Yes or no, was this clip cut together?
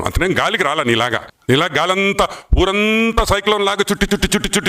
yes